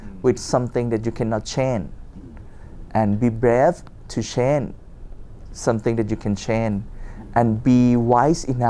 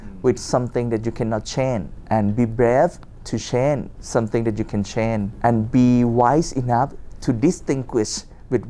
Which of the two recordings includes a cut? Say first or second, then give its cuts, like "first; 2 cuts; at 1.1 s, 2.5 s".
second; 3 cuts; at 1.9 s, 3.9 s, 5.3 s